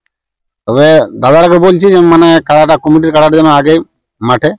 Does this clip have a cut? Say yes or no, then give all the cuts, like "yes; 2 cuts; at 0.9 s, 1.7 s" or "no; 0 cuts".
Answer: no; 0 cuts